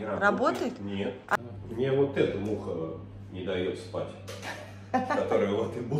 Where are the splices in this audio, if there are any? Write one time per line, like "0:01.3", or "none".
0:01.4